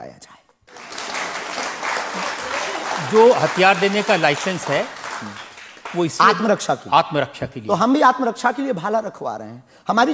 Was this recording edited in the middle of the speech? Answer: no; 0 cuts

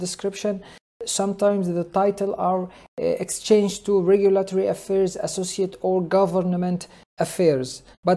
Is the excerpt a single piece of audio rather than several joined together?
yes; 0 cuts

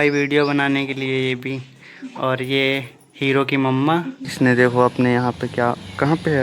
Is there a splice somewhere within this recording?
yes; 1 cut; at 4.2 s

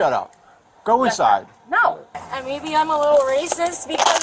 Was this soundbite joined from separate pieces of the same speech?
yes; 1 cut; at 2.3 s

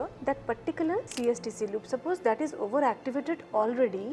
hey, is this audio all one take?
yes; 0 cuts

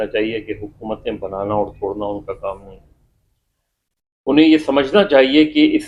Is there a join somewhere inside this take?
no; 0 cuts

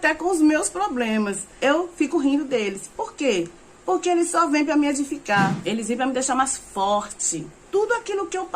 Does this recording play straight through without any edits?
no; 3 cuts; at 1.4 s, 5.6 s, 7.6 s

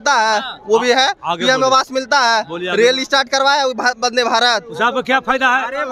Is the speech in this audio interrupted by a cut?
no; 0 cuts

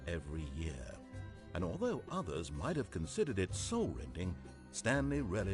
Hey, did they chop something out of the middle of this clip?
no; 0 cuts

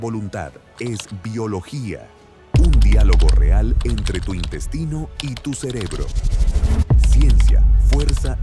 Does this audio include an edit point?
no; 0 cuts

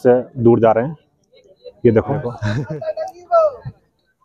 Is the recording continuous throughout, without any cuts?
no; 1 cut; at 2.4 s

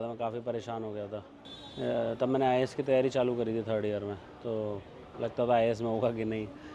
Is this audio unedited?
yes; 0 cuts

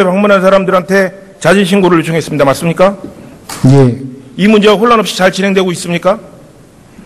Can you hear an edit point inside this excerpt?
yes; 1 cut; at 4.6 s

